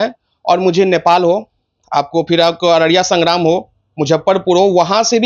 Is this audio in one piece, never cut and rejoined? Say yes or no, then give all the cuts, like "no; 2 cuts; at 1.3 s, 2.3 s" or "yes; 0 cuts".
yes; 0 cuts